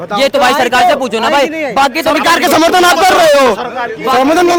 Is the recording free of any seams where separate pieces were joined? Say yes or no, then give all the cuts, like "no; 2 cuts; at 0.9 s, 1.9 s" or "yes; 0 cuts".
yes; 0 cuts